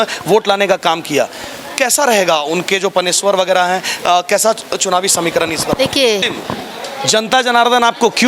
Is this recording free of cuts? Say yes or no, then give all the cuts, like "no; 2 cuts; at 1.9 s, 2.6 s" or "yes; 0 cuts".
no; 1 cut; at 6.3 s